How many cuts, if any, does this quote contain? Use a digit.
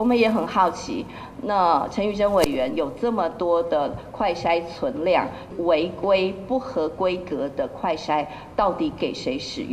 1